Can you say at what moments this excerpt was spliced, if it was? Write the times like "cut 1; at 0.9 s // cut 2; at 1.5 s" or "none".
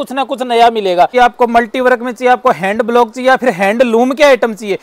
cut 1; at 1.1 s